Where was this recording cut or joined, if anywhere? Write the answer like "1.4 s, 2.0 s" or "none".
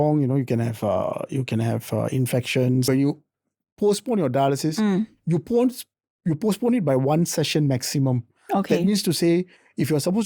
2.9 s